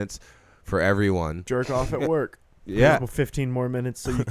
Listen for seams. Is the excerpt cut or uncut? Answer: cut